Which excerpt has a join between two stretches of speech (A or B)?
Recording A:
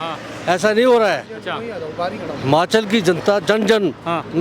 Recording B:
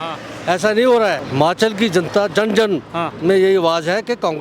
B